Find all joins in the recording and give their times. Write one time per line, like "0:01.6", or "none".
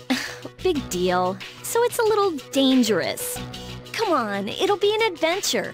none